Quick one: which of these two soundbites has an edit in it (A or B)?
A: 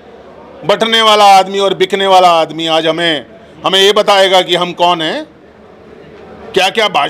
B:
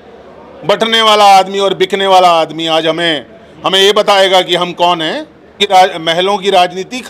B